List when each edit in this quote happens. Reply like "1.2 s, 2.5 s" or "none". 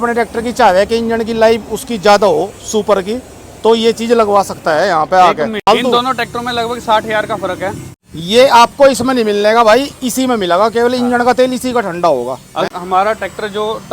5.7 s, 7.9 s, 12.7 s